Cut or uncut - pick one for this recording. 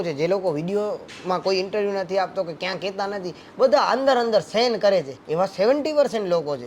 uncut